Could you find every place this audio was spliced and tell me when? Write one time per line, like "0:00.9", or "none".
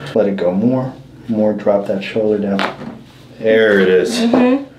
none